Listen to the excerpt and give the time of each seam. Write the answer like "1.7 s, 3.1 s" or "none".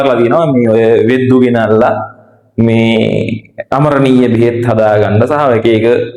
none